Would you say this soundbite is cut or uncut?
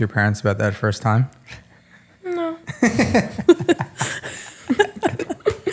uncut